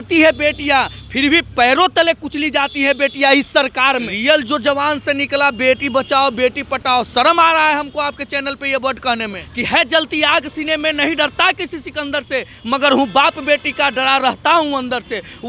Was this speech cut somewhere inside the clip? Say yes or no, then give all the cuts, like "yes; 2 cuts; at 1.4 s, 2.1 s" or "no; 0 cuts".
yes; 2 cuts; at 4.1 s, 9.5 s